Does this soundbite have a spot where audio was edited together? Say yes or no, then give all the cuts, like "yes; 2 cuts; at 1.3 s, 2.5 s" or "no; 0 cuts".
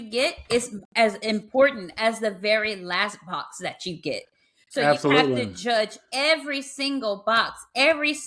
no; 0 cuts